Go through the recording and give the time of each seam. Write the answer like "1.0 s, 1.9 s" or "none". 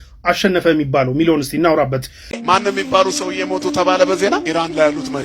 2.4 s